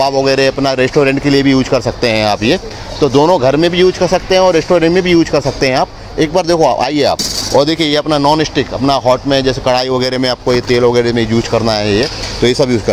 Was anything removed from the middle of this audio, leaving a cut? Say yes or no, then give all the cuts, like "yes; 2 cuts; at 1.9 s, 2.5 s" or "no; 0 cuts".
no; 0 cuts